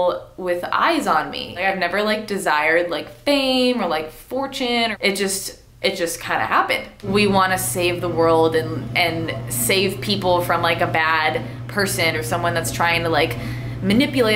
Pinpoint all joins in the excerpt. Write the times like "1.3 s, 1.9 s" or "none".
1.6 s, 4.9 s, 7.1 s, 12.1 s

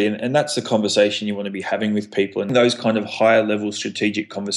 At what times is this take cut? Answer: 2.5 s

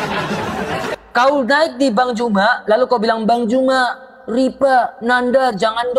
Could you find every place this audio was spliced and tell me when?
1.0 s

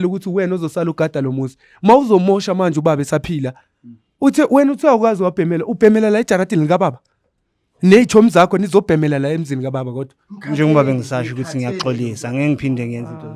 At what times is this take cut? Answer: none

